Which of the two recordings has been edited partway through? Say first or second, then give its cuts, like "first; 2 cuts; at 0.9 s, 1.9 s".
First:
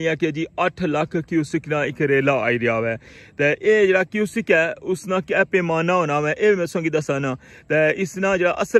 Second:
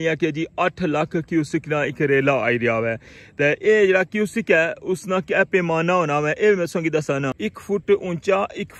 second; 1 cut; at 7.4 s